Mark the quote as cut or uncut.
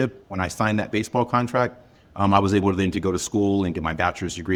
uncut